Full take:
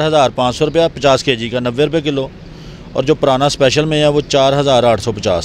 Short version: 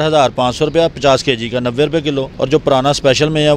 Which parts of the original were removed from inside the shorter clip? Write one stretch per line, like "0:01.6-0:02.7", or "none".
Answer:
0:02.3-0:02.9